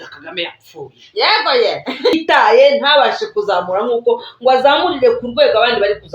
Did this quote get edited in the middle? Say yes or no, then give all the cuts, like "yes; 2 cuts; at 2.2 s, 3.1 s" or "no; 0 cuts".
yes; 1 cut; at 2.1 s